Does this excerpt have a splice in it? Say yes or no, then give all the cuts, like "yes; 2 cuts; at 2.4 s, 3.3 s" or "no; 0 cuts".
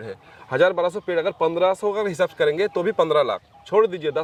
no; 0 cuts